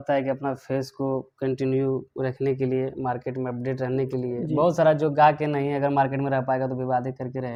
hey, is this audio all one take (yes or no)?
yes